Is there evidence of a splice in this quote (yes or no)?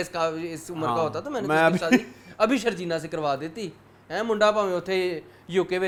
no